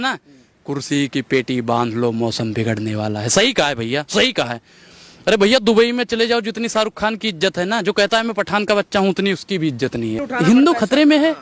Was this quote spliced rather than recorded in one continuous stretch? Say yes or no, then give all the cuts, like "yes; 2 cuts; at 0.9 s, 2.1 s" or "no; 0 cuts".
yes; 1 cut; at 10.3 s